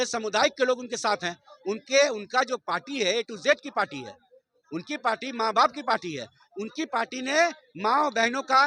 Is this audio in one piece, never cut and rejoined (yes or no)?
yes